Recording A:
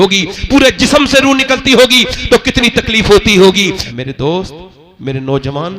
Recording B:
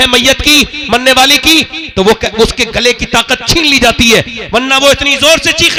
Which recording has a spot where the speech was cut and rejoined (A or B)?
A